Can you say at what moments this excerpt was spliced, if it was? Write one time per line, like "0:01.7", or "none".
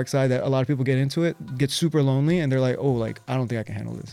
none